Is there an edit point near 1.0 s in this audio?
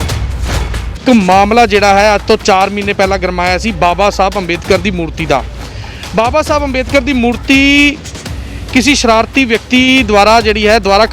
yes; 1 cut; at 1.0 s

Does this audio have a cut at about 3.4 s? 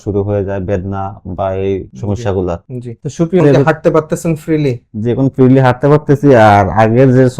yes; 1 cut; at 3.4 s

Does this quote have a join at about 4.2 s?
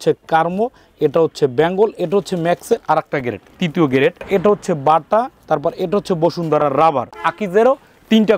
yes; 2 cuts; at 4.2 s, 7.2 s

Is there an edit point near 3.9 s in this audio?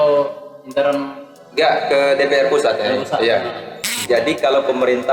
yes; 1 cut; at 3.9 s

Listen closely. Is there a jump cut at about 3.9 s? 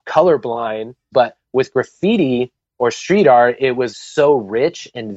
yes; 2 cuts; at 1.0 s, 3.9 s

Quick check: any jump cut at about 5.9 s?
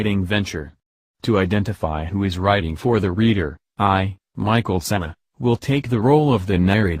yes; 1 cut; at 5.9 s

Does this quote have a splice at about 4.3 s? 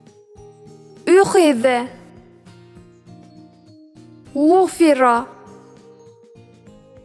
yes; 3 cuts; at 1.0 s, 2.6 s, 4.3 s

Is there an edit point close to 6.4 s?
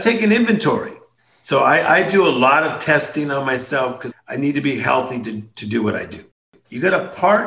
yes; 1 cut; at 6.4 s

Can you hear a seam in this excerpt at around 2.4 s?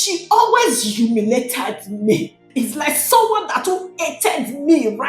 yes; 1 cut; at 2.4 s

